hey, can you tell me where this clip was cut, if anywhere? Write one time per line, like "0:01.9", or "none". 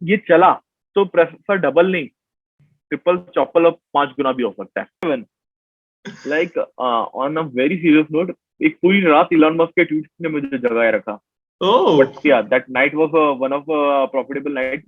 0:05.0

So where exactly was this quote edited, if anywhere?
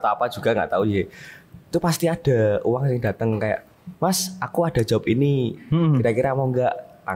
none

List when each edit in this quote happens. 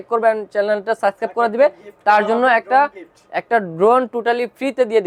none

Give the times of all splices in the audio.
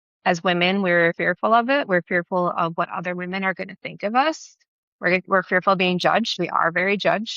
0:01.2
0:06.3

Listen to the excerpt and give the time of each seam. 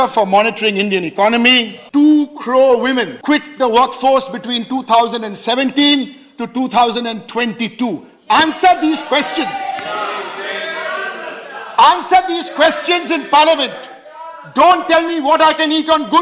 0:01.8
0:03.1

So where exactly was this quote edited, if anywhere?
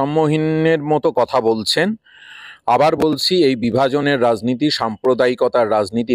none

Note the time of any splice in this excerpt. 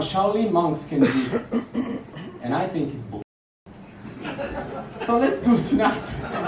none

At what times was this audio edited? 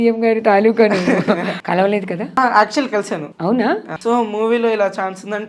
0:01.5
0:02.4
0:03.3
0:03.9

